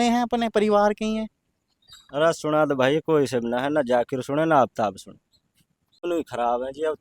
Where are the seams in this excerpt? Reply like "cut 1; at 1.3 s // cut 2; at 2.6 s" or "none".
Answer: cut 1; at 6.0 s